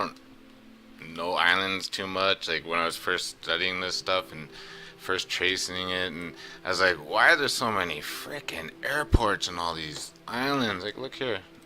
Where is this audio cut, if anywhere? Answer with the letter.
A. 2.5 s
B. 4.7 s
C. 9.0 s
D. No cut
B